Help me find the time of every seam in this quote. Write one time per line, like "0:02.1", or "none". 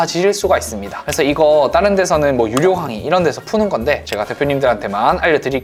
none